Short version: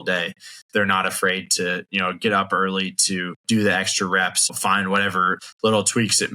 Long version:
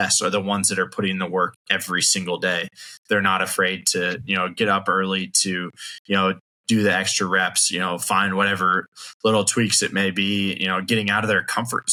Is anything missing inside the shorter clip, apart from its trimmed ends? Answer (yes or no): yes